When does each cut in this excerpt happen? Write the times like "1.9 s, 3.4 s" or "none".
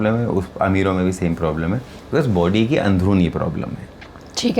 none